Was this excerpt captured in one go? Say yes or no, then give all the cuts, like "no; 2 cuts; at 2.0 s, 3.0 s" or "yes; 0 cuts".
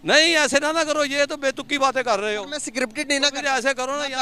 yes; 0 cuts